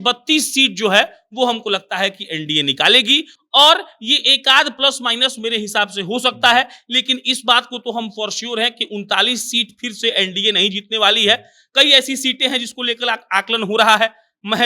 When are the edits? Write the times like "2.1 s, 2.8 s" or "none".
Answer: none